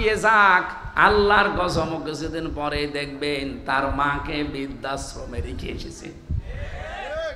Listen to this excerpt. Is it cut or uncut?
uncut